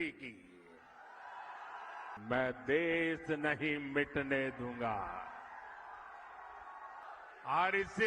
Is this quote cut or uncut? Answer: cut